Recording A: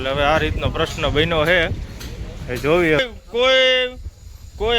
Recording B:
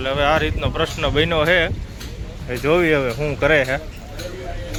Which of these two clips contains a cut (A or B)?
A